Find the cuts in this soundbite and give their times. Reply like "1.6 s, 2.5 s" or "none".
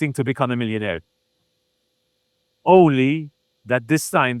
none